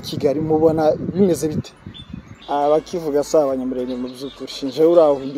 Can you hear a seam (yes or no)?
yes